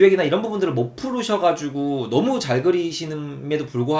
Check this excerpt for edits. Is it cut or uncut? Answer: uncut